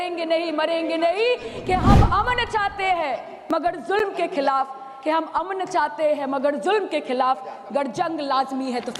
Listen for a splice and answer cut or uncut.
uncut